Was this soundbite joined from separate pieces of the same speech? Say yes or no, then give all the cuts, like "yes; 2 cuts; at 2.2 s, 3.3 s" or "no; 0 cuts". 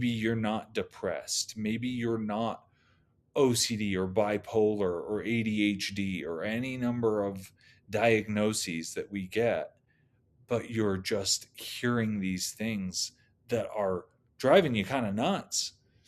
no; 0 cuts